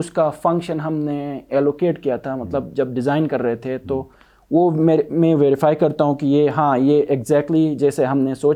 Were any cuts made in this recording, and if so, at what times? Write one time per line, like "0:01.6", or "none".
none